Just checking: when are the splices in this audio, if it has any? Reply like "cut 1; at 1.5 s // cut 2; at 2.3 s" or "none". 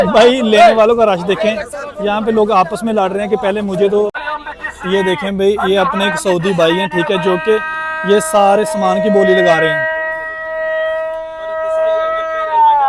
cut 1; at 4.1 s